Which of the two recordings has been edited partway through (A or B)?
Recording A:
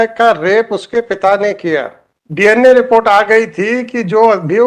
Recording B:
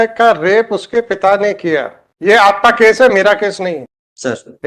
A